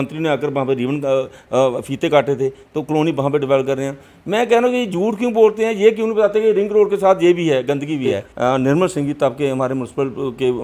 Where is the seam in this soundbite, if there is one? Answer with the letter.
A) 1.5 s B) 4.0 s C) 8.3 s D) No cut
C